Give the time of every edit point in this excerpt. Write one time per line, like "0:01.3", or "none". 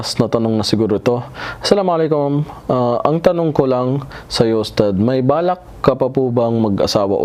none